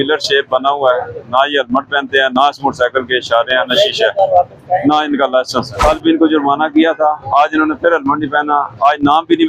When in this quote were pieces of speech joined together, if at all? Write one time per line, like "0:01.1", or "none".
0:05.7